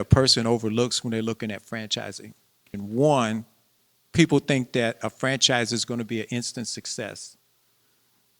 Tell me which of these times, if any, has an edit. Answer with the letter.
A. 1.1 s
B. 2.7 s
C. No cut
B